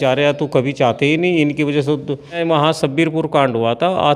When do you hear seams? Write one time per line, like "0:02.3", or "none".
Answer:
0:02.4